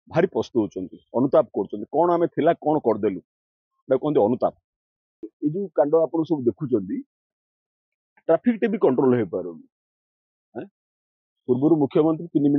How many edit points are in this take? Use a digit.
1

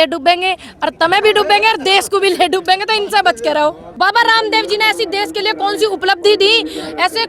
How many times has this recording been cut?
1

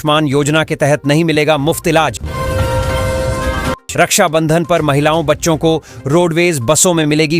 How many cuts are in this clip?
0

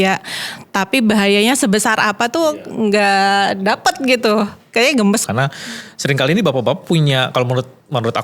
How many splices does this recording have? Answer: 1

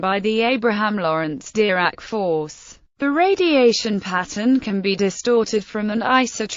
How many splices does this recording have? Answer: 0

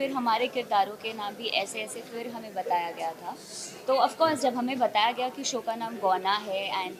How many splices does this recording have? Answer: 0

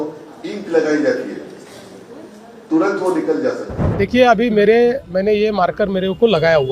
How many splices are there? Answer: 1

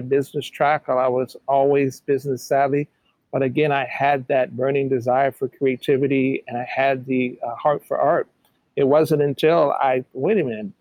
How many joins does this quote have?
0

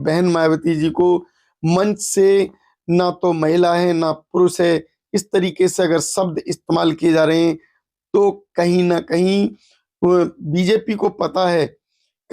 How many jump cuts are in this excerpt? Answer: 0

